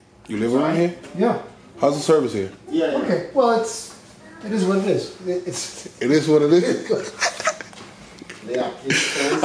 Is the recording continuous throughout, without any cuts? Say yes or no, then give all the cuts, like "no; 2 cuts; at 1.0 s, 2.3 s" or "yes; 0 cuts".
yes; 0 cuts